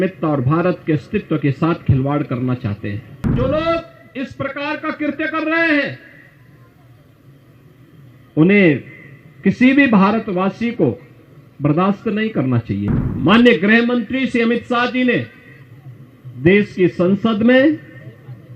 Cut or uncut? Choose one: cut